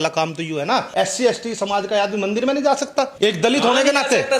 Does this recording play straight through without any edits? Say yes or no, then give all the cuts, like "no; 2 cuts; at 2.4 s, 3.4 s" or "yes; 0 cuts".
no; 2 cuts; at 0.9 s, 3.1 s